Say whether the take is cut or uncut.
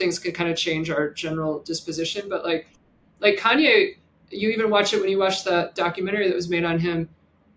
uncut